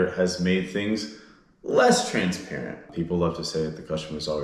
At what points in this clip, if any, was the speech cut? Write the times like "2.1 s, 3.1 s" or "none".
2.9 s